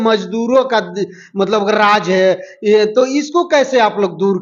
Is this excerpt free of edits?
yes; 0 cuts

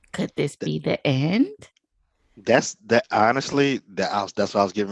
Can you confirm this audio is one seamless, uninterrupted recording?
yes; 0 cuts

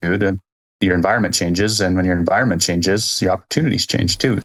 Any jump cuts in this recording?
no; 0 cuts

